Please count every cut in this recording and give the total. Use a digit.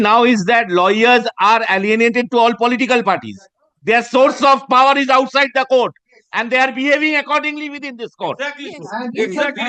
0